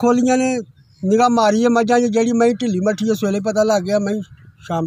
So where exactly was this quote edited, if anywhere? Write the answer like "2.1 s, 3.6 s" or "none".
none